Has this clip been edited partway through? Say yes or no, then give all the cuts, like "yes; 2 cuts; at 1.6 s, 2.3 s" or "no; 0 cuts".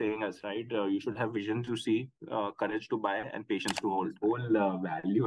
yes; 1 cut; at 4.1 s